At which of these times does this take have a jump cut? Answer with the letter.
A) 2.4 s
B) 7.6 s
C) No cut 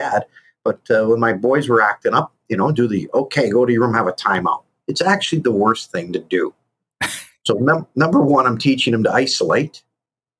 C